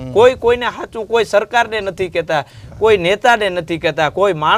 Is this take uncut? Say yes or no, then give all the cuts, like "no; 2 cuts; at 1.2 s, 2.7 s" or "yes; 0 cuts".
yes; 0 cuts